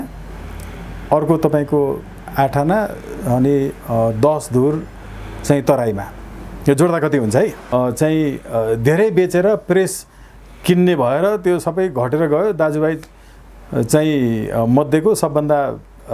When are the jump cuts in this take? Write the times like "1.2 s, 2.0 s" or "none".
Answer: 7.6 s